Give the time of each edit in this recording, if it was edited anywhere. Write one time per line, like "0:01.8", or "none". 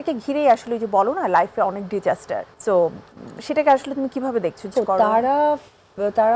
0:02.5
0:04.7